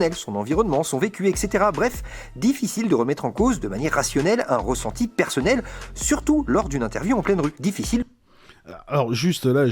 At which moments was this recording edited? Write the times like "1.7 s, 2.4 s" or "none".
8.0 s